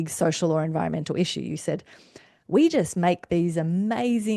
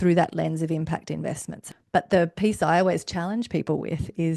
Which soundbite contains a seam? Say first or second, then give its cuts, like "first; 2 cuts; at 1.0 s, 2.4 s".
second; 1 cut; at 1.5 s